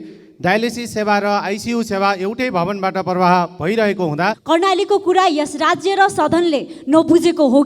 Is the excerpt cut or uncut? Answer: cut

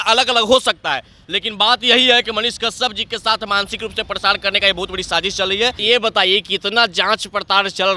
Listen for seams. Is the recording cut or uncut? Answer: cut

